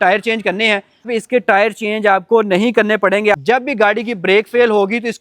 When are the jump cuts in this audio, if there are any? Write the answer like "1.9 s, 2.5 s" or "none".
1.1 s, 3.3 s